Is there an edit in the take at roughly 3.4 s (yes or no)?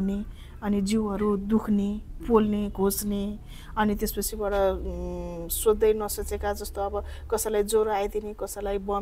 no